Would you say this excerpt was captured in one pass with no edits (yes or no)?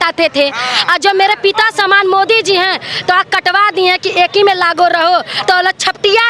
yes